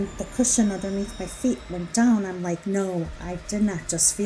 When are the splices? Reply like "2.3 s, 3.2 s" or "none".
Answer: 1.9 s, 2.6 s